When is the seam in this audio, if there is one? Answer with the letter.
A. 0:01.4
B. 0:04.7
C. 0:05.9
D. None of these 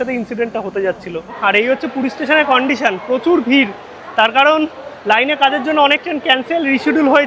A